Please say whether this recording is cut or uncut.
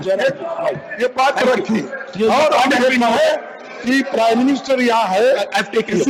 uncut